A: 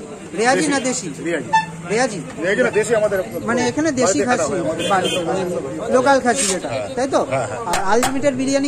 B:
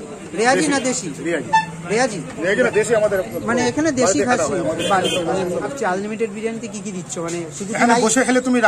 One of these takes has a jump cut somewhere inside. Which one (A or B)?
B